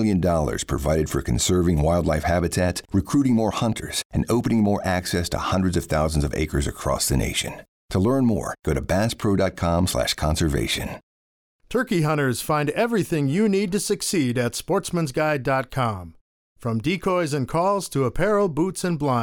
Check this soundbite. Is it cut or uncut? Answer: cut